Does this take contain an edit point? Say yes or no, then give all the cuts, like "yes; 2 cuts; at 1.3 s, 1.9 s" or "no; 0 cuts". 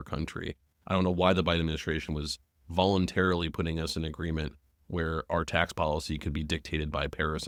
no; 0 cuts